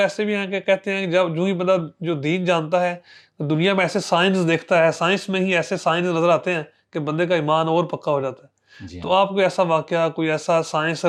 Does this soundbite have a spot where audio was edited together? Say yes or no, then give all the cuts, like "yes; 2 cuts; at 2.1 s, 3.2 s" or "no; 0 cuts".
no; 0 cuts